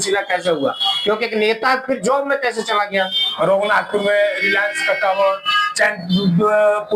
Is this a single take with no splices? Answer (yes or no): no